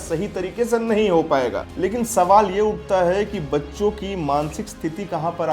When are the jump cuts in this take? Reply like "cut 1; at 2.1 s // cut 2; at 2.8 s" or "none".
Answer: cut 1; at 1.6 s